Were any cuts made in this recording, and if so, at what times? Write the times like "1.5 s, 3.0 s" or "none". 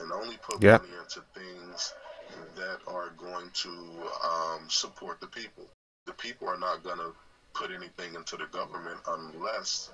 5.9 s